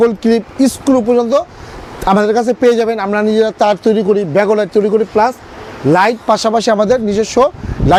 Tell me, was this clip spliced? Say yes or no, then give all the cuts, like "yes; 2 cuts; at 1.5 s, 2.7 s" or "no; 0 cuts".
no; 0 cuts